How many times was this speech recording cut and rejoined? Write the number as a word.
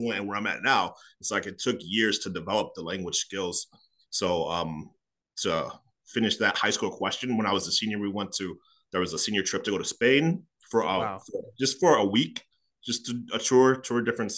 zero